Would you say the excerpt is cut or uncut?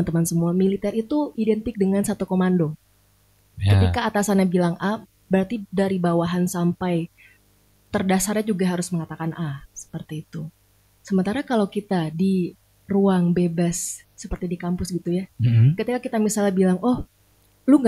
uncut